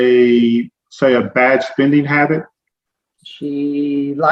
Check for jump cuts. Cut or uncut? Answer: uncut